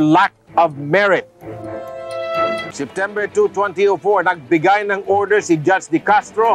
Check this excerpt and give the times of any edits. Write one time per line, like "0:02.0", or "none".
0:02.9